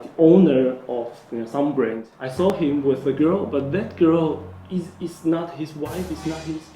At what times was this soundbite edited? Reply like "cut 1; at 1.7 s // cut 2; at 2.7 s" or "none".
cut 1; at 2.5 s